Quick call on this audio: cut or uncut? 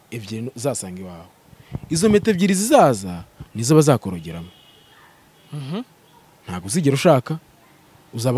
uncut